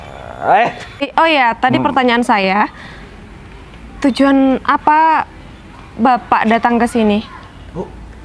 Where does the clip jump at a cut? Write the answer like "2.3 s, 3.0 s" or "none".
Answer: 1.1 s